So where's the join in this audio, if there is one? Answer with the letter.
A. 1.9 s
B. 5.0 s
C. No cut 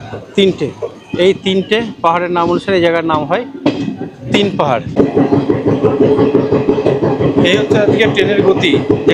B